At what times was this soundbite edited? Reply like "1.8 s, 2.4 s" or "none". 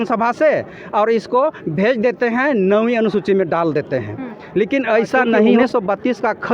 5.6 s